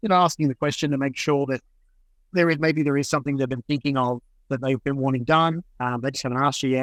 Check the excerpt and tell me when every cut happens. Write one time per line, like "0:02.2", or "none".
none